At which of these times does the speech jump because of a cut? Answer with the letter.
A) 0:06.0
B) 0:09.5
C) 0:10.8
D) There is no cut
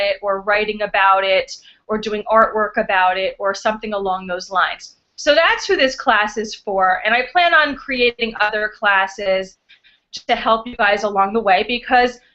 A